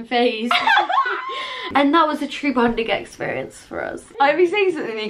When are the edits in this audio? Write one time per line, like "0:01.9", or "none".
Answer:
0:01.5
0:04.0